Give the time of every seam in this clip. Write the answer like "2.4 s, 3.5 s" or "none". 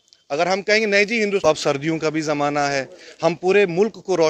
1.5 s